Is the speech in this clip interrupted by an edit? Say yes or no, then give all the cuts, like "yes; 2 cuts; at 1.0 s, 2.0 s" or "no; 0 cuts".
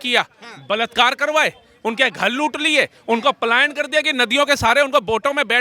no; 0 cuts